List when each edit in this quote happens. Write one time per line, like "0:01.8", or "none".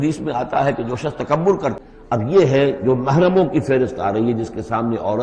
0:01.8